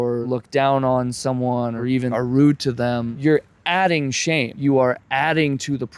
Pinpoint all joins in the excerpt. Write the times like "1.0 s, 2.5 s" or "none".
3.1 s, 4.6 s